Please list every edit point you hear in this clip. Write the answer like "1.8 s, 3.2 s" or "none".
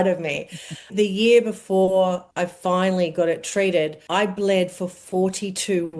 0.9 s, 2.3 s, 4.0 s